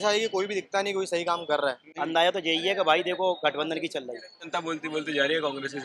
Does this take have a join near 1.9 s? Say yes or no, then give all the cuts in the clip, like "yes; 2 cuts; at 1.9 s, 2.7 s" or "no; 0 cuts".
yes; 2 cuts; at 1.9 s, 4.5 s